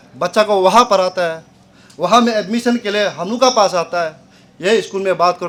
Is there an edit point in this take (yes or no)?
no